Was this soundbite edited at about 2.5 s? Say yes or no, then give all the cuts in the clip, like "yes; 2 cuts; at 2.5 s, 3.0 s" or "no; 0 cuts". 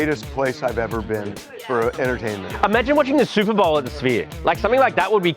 yes; 1 cut; at 2.5 s